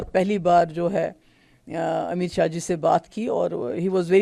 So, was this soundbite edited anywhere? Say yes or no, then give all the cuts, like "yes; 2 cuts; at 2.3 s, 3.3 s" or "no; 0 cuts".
no; 0 cuts